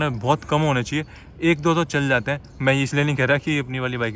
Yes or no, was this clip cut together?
no